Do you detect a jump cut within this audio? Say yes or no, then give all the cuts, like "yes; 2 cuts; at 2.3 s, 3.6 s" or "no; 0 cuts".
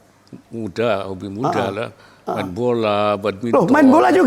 no; 0 cuts